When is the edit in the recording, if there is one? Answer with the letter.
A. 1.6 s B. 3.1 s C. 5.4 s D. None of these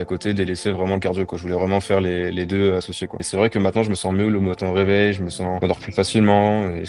B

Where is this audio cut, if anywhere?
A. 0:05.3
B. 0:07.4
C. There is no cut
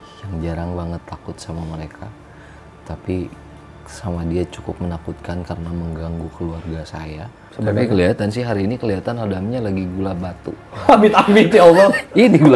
B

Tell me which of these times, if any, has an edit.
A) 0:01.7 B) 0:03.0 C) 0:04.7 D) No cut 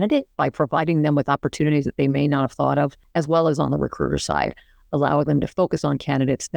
B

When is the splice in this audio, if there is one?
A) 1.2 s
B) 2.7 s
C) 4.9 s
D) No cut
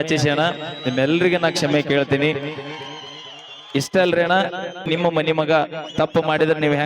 C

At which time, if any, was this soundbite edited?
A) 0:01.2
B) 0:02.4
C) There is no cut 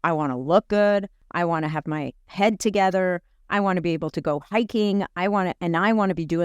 A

